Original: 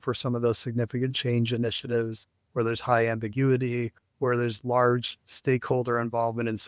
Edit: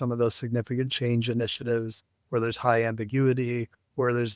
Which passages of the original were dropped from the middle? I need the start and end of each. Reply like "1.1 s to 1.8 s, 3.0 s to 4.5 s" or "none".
none